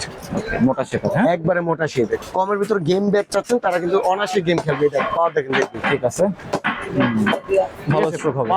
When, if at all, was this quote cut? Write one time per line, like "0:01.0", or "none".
0:02.2